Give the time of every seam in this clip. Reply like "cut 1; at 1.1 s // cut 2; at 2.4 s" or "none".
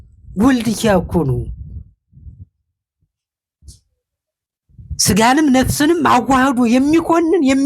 none